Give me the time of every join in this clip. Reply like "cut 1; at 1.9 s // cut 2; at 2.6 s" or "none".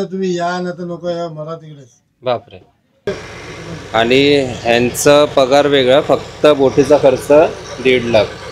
cut 1; at 3.1 s